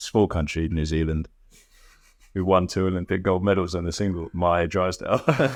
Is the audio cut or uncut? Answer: uncut